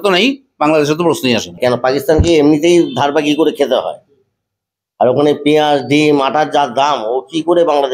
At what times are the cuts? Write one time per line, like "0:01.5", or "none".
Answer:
0:01.6